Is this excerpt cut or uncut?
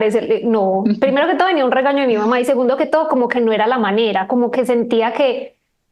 uncut